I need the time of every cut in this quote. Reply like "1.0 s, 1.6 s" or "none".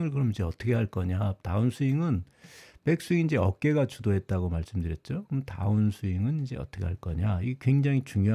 none